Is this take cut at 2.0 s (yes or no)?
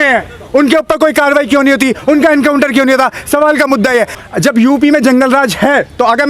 no